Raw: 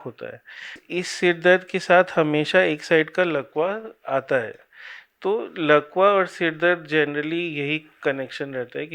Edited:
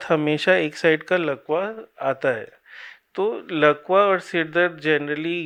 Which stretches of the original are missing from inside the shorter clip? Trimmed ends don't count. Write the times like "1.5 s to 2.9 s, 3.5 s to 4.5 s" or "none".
none